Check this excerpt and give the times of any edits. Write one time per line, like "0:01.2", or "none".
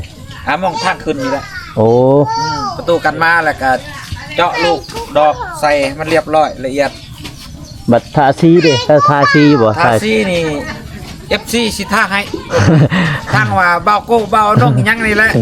none